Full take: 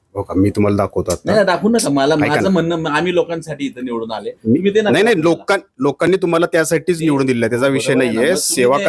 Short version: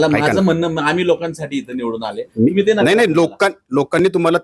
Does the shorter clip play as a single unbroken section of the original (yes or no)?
yes